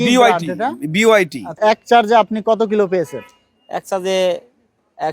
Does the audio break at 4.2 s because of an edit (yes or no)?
no